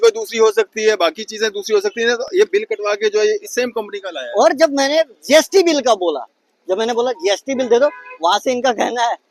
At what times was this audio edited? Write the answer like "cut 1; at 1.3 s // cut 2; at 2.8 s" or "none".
none